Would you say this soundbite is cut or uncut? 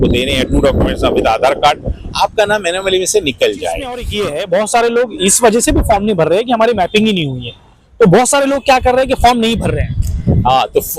cut